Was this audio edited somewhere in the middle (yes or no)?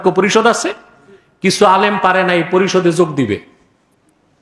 no